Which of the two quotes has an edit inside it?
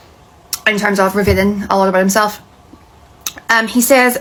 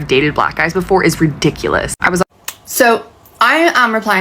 second; 1 cut; at 2.2 s

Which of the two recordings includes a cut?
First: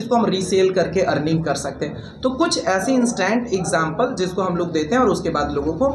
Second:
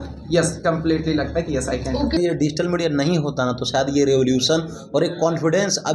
second; 1 cut; at 2.2 s

